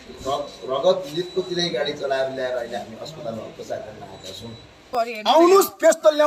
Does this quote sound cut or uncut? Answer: cut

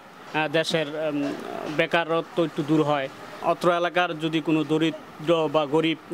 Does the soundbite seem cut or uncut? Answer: cut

